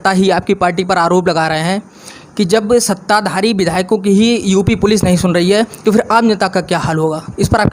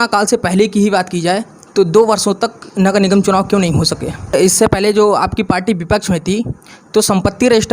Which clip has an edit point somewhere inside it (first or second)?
second